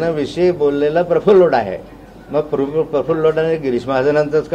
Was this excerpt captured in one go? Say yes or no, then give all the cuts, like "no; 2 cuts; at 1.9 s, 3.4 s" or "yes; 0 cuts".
yes; 0 cuts